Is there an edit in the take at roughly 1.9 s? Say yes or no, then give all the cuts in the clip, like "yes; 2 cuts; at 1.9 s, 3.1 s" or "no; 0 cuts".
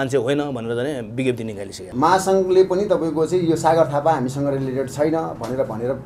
yes; 1 cut; at 1.9 s